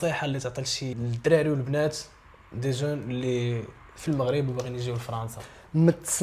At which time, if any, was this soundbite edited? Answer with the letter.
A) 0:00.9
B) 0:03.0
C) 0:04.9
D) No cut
A